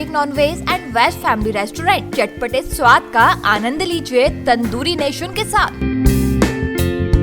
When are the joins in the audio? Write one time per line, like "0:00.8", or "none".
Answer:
none